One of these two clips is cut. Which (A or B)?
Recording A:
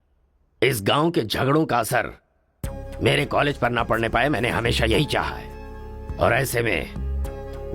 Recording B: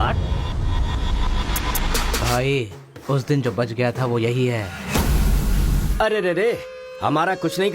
B